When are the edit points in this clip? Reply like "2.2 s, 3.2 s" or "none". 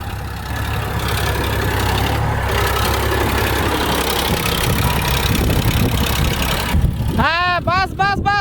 3.6 s, 6.7 s